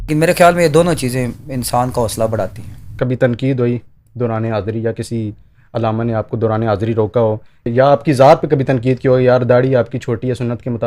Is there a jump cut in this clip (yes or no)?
yes